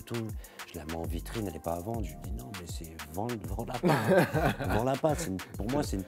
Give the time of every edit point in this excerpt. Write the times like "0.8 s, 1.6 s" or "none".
none